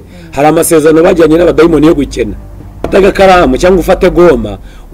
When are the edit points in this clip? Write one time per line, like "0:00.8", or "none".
0:02.9